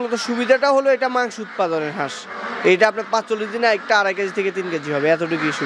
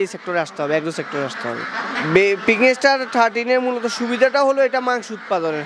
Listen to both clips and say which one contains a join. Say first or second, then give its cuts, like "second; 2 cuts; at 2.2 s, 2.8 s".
second; 1 cut; at 1.9 s